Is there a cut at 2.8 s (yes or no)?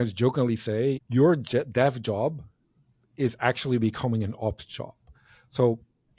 no